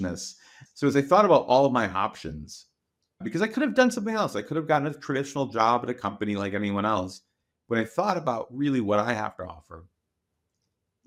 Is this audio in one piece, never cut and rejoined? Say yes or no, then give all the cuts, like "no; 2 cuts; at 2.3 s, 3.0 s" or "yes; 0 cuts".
yes; 0 cuts